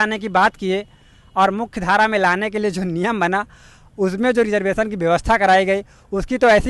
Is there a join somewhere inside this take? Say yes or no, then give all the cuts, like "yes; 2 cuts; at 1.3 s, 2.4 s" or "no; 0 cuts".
no; 0 cuts